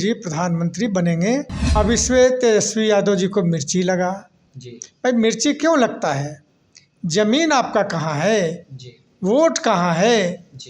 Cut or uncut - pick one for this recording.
cut